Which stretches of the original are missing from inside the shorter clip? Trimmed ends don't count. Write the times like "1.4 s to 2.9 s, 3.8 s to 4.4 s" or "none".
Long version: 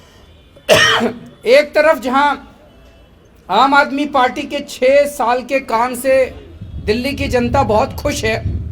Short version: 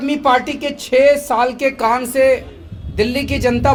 none